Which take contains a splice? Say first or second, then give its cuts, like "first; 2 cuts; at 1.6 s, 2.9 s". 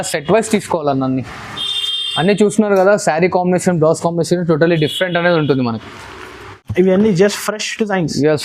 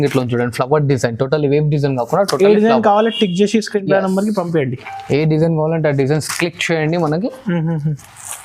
first; 1 cut; at 6.6 s